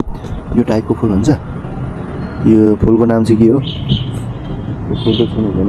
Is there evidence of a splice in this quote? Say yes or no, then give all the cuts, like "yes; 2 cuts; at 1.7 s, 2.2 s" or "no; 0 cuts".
no; 0 cuts